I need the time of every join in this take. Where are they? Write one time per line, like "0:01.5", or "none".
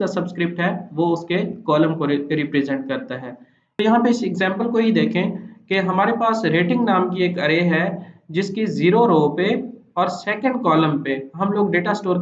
0:03.8